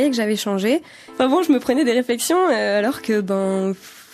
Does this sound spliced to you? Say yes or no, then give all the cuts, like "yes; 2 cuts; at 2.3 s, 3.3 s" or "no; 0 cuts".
yes; 1 cut; at 1.0 s